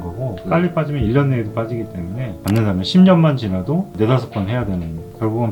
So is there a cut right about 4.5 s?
no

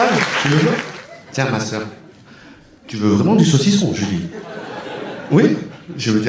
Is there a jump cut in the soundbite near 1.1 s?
no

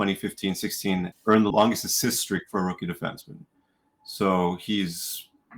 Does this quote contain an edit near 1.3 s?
yes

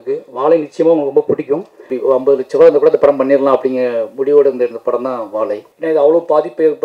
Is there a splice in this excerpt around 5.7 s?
yes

